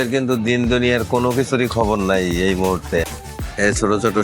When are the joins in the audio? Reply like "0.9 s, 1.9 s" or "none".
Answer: 3.2 s